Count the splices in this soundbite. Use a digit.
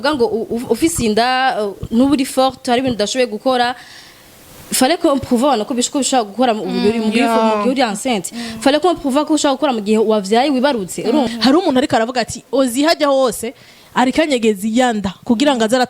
1